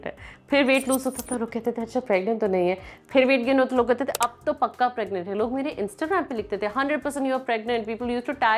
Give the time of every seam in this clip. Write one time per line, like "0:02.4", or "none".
none